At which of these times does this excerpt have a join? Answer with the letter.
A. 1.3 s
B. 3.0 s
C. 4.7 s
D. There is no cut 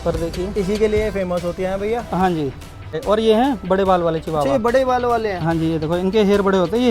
B